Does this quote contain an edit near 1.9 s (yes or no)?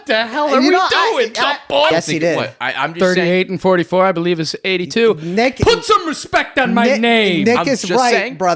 yes